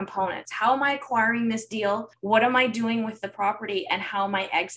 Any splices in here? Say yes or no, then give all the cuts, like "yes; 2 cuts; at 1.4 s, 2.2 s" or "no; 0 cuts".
yes; 1 cut; at 2.1 s